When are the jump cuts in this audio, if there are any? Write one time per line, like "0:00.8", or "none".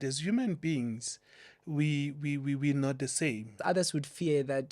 0:03.6